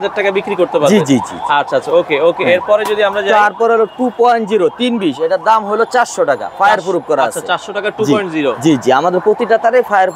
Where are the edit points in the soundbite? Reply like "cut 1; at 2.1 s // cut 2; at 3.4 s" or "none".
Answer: none

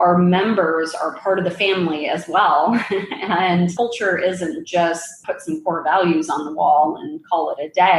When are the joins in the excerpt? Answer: none

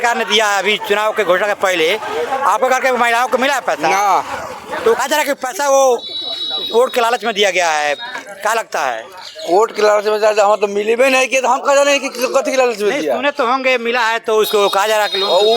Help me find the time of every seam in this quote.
cut 1; at 5.0 s

